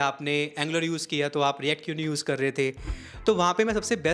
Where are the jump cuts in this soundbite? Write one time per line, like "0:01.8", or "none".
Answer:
none